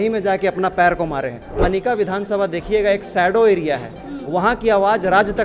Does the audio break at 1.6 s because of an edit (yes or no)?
yes